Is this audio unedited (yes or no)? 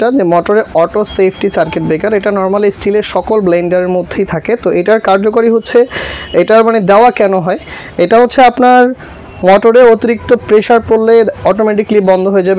yes